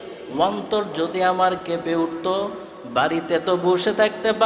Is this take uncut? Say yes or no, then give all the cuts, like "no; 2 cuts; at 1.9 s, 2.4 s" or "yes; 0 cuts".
yes; 0 cuts